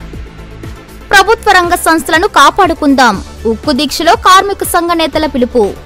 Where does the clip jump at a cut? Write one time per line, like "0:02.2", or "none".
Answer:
none